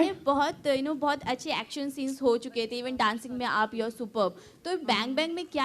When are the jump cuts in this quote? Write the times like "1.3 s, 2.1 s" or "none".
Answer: 1.3 s